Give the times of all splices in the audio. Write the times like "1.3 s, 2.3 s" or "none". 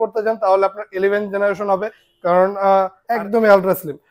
3.0 s

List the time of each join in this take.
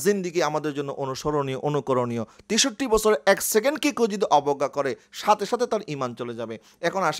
none

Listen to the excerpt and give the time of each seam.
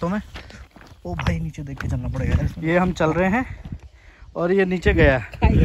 2.5 s

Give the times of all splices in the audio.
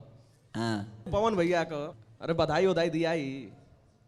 1.1 s, 1.9 s

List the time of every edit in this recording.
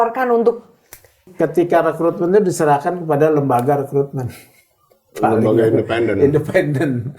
1.2 s

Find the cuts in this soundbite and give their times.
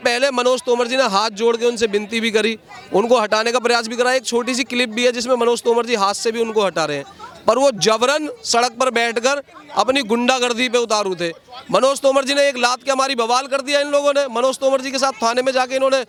none

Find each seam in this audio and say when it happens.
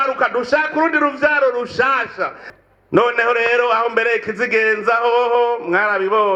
2.4 s

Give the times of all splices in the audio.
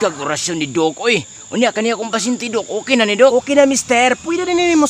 3.3 s

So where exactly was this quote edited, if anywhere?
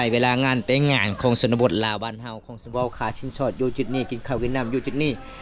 2.7 s

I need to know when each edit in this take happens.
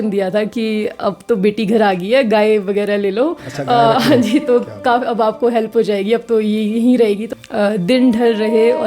7.3 s

